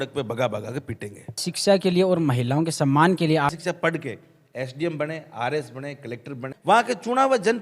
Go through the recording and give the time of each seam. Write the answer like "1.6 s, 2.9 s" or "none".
1.5 s, 3.6 s, 6.5 s